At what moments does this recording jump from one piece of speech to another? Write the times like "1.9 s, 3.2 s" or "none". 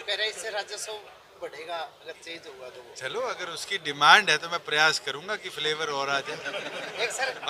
none